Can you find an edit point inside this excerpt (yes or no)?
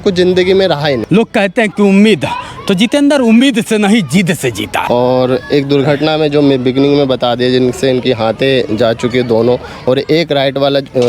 yes